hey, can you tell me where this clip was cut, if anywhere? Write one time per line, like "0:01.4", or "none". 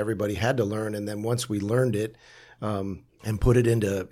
0:03.1